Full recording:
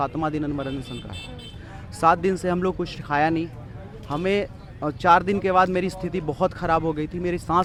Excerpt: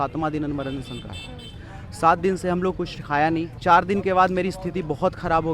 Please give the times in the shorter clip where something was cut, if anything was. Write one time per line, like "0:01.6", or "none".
0:03.6